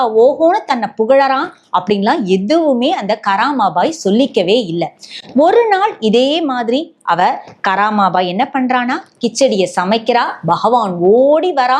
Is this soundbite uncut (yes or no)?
yes